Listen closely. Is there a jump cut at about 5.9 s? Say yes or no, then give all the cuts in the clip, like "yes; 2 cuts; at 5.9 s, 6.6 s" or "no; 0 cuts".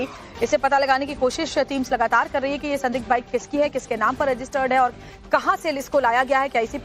no; 1 cut; at 2.6 s